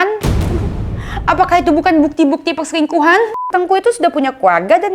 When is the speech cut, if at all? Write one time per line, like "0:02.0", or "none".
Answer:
0:03.5